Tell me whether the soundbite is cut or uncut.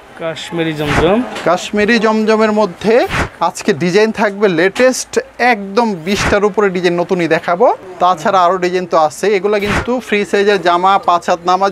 cut